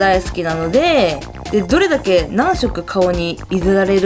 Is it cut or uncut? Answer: uncut